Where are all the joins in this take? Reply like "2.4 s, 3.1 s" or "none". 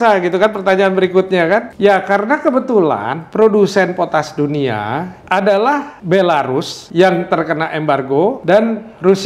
1.7 s, 5.1 s, 5.9 s, 6.8 s, 8.4 s

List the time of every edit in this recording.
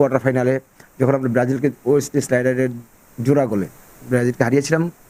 none

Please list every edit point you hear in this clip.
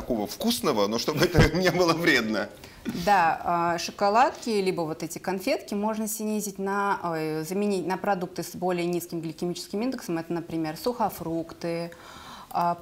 none

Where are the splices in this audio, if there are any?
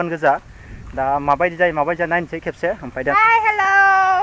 3.1 s

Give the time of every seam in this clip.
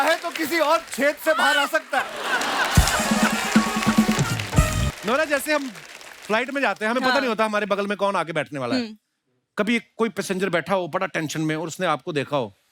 4.9 s

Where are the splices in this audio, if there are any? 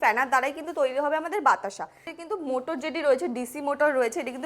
2.1 s

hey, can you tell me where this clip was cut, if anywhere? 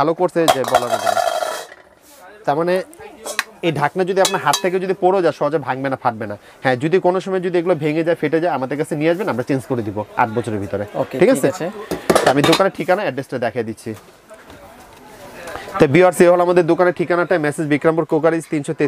none

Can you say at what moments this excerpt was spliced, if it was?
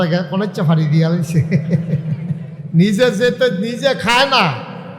2.5 s

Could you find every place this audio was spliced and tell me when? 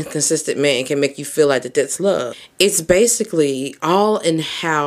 2.4 s

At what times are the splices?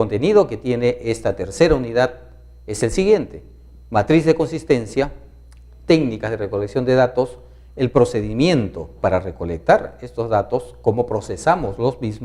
5.5 s

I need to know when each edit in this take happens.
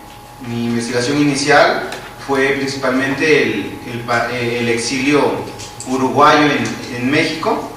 3.4 s

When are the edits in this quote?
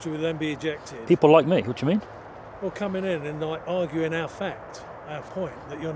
none

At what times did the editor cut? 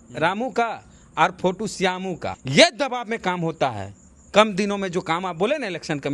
2.3 s

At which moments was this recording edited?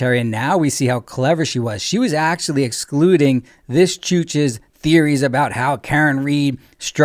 none

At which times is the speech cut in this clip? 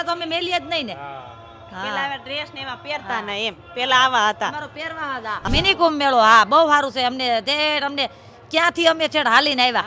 5.4 s

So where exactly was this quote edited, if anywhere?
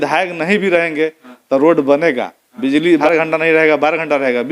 3.0 s

